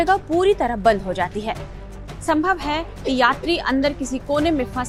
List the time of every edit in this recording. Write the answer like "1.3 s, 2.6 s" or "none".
none

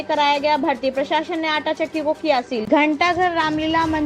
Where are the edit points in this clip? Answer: 2.6 s

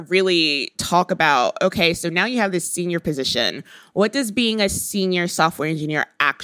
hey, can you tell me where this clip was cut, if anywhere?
none

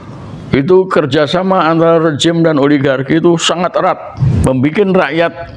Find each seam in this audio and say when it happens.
4.2 s

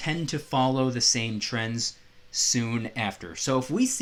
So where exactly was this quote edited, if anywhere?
none

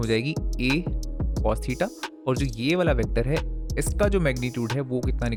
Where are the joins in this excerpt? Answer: none

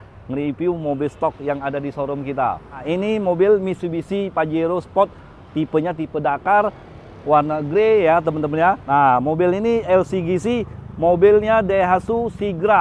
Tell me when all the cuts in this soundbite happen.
2.8 s, 8.8 s

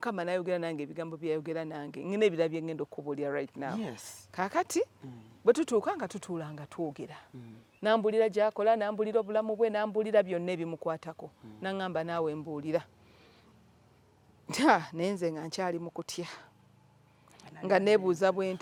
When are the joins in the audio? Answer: none

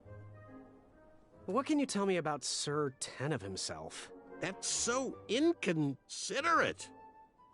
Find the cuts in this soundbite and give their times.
1.5 s

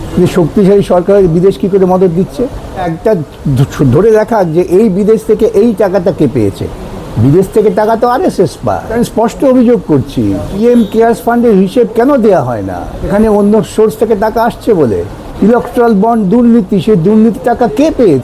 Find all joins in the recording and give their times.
2.9 s, 8.9 s, 10.6 s, 13.1 s, 15.2 s

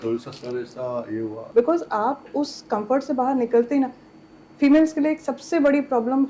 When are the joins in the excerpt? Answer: 1.4 s

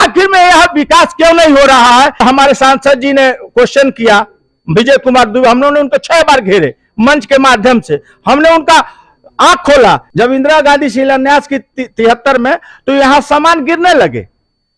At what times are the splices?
2.2 s, 10.1 s

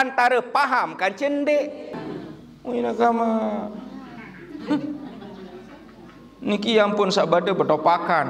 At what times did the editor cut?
1.9 s

